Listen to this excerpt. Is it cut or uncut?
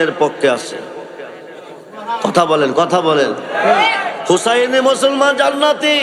uncut